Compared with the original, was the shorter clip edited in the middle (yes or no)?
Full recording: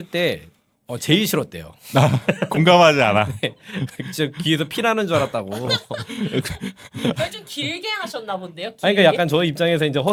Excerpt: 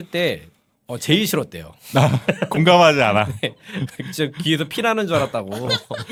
no